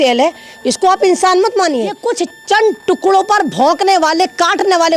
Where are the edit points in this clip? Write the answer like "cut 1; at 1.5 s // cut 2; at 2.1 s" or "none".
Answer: cut 1; at 2.0 s